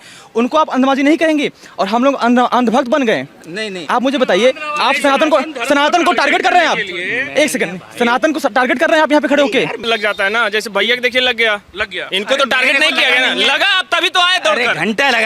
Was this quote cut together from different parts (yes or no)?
yes